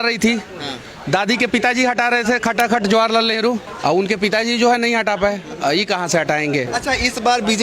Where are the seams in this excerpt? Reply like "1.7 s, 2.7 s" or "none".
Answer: 3.7 s, 6.7 s